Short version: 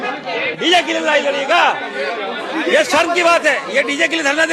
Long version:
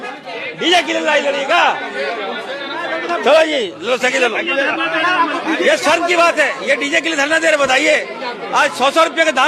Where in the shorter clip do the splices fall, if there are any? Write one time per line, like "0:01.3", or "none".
0:02.5